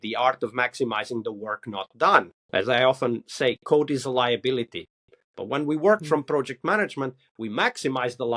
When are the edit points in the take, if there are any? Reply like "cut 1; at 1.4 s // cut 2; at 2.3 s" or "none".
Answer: cut 1; at 2.4 s

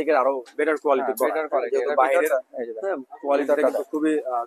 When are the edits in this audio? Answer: none

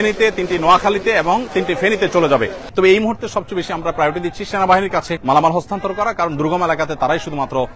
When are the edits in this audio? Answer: cut 1; at 2.6 s // cut 2; at 5.1 s

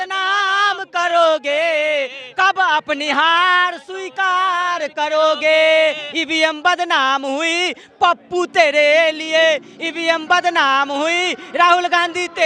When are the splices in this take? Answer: none

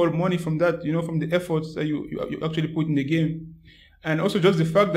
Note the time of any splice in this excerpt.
none

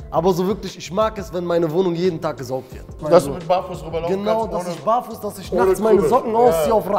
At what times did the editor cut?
cut 1; at 2.9 s

